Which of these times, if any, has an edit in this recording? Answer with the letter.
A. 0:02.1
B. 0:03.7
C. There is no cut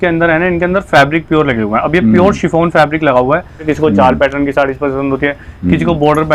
B